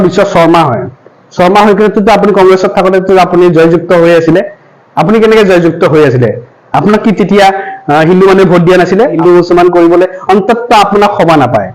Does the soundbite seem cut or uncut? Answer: cut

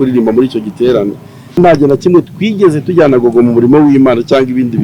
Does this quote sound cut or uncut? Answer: cut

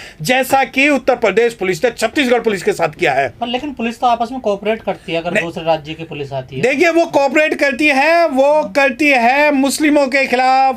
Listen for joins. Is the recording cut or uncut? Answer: uncut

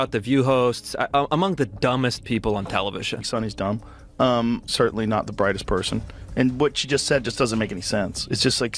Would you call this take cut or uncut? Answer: uncut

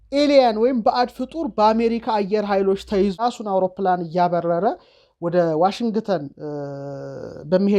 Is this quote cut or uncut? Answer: cut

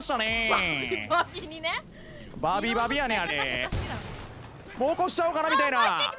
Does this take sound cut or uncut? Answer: cut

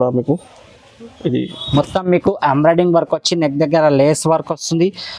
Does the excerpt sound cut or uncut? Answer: cut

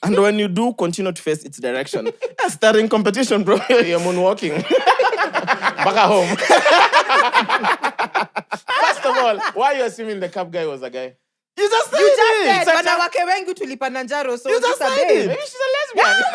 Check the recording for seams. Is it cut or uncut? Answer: cut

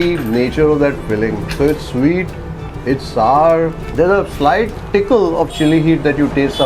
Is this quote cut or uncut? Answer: cut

